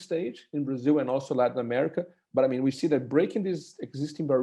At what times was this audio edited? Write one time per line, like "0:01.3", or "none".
none